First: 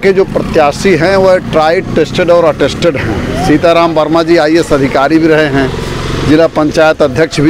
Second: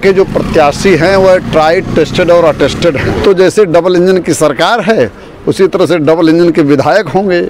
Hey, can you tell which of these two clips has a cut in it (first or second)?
second